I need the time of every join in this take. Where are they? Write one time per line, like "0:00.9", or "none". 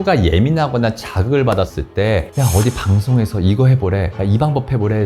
0:01.8